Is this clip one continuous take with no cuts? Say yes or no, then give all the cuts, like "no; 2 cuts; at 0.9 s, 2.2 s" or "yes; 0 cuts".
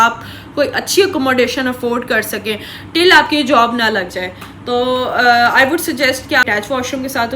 no; 1 cut; at 6.4 s